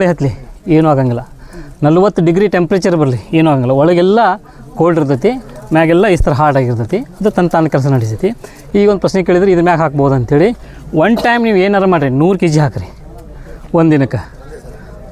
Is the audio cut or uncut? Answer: uncut